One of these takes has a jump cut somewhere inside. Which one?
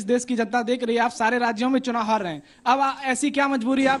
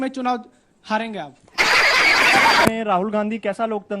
second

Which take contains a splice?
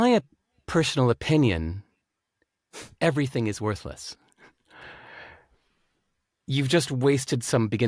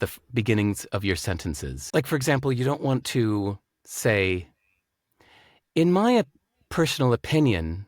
second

